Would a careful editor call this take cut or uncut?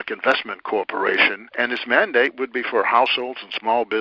cut